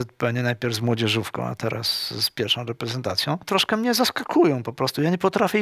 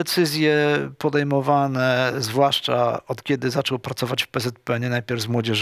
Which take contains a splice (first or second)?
first